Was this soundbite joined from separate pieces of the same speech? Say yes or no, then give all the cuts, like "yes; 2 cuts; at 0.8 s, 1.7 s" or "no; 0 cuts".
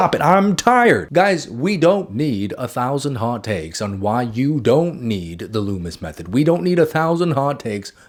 no; 0 cuts